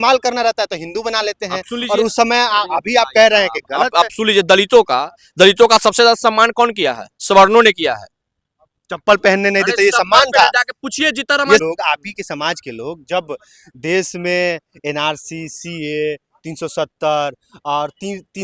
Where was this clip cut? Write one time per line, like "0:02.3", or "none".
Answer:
0:11.6